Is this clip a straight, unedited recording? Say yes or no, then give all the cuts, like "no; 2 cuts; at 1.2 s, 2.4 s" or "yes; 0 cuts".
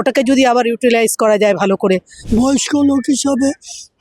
no; 1 cut; at 2.1 s